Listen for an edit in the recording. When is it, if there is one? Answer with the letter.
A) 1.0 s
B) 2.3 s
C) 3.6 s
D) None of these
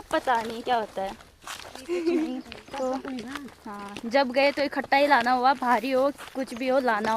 B